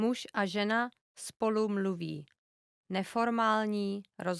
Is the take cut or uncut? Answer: uncut